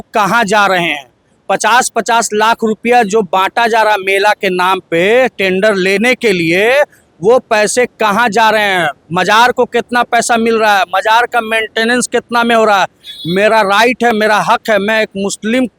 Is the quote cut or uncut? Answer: uncut